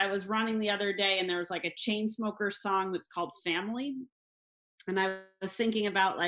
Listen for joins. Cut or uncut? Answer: uncut